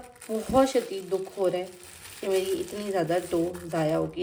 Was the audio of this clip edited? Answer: no; 0 cuts

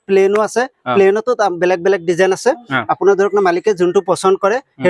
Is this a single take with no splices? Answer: yes; 0 cuts

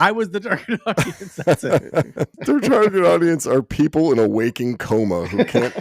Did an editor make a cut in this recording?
yes; 1 cut; at 2.3 s

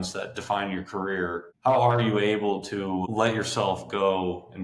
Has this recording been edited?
no; 0 cuts

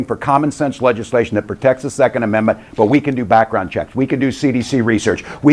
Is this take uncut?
no; 1 cut; at 1.5 s

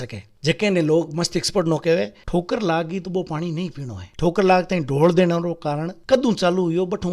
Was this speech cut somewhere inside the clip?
yes; 2 cuts; at 2.2 s, 4.1 s

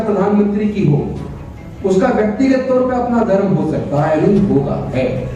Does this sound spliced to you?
no; 0 cuts

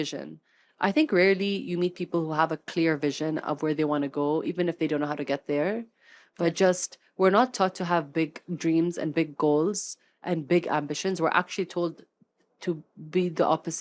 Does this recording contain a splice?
no; 0 cuts

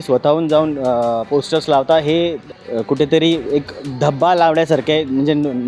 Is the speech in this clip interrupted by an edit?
yes; 1 cut; at 2.5 s

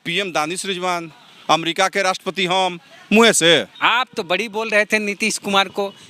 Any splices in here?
yes; 1 cut; at 3.7 s

